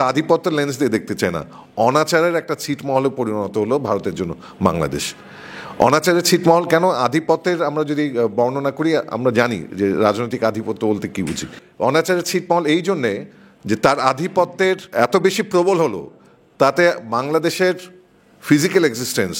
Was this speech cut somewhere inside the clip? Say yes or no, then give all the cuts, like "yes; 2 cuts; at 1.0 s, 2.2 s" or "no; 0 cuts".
no; 0 cuts